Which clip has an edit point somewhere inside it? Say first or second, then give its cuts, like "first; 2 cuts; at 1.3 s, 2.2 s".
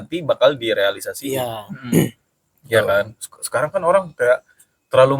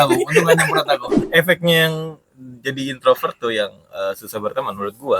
second; 1 cut; at 1.2 s